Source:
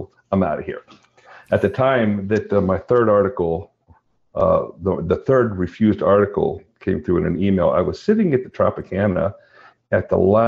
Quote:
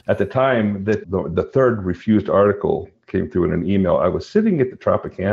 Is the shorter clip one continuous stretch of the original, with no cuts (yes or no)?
no